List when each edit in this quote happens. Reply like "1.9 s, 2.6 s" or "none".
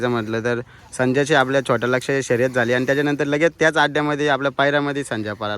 none